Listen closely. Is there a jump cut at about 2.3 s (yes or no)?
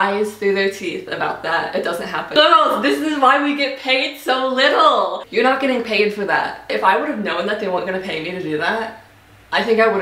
yes